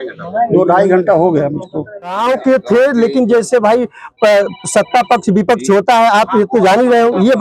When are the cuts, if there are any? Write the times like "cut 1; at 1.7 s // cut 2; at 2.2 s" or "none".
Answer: cut 1; at 2.2 s